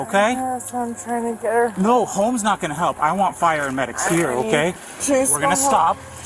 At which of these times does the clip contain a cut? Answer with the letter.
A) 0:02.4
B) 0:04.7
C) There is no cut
B